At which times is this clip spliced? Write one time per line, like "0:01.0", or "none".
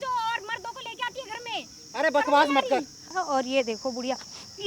0:03.1